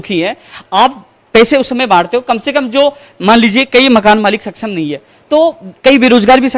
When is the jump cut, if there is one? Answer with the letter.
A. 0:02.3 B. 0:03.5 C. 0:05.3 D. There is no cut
D